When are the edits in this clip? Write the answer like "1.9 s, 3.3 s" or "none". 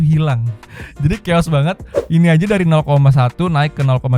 1.9 s